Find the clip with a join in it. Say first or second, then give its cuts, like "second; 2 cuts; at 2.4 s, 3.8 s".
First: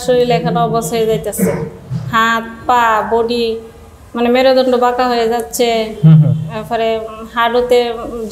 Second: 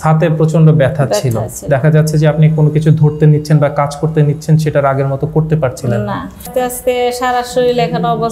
second; 1 cut; at 6.5 s